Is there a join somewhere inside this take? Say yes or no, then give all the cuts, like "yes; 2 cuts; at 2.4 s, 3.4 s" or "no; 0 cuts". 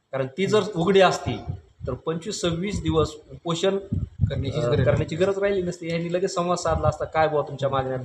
no; 0 cuts